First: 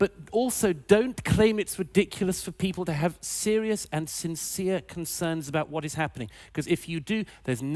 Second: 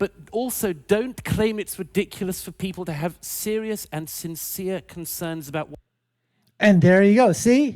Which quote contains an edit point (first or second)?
first